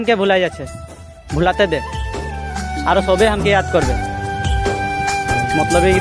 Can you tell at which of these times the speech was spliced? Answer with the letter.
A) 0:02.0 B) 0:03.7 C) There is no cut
C